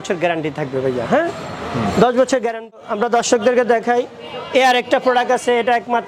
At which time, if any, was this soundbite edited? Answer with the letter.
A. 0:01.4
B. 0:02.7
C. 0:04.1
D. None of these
B